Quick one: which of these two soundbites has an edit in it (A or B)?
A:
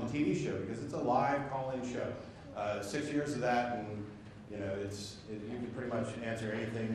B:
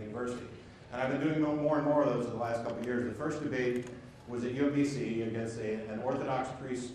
A